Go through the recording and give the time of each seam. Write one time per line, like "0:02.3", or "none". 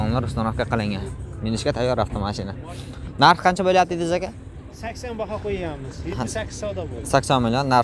none